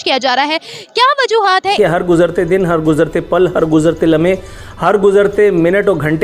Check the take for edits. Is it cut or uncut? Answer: cut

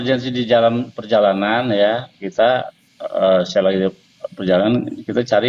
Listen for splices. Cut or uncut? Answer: uncut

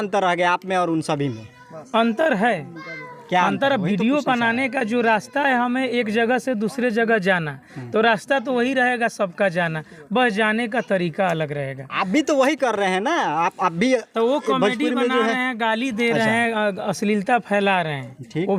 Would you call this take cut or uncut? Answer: uncut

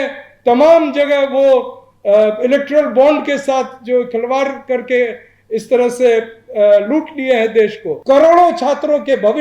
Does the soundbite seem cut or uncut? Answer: cut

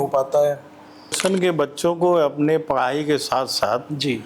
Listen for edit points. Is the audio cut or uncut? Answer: cut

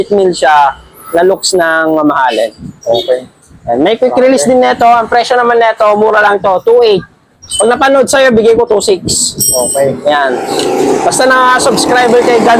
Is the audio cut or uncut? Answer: uncut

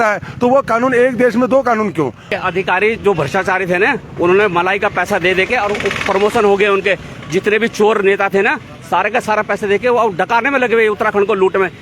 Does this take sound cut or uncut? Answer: cut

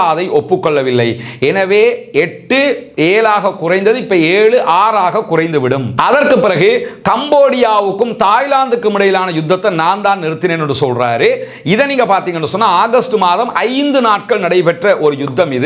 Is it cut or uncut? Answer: uncut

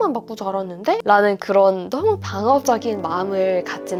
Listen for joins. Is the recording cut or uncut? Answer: uncut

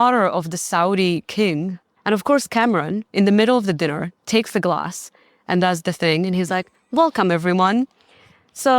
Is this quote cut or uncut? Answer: cut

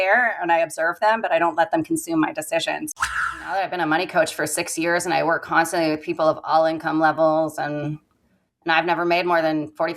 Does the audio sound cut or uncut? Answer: cut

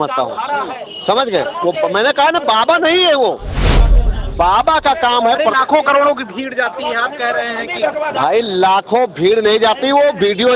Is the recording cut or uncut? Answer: uncut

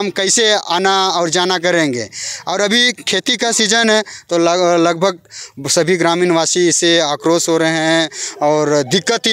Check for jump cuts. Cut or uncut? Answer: uncut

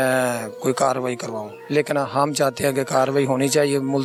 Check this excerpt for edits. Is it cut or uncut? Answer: uncut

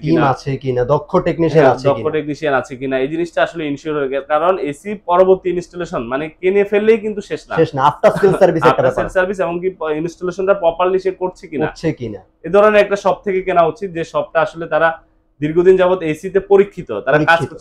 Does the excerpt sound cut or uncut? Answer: uncut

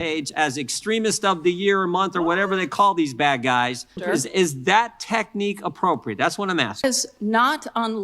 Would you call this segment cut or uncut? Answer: cut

